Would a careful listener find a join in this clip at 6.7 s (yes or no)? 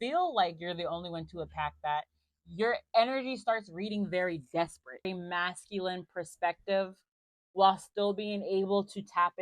no